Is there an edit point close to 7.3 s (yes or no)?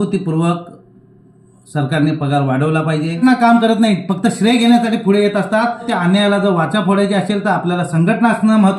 no